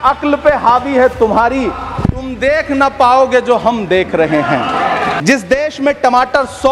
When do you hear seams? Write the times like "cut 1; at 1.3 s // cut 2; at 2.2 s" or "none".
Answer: cut 1; at 5.2 s